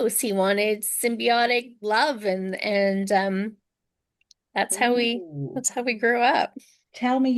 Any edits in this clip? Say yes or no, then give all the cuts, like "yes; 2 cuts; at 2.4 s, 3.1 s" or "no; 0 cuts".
no; 0 cuts